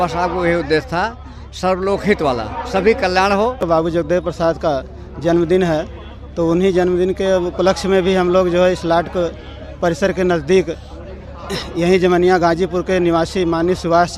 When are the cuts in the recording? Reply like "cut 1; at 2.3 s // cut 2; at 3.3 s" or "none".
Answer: cut 1; at 3.6 s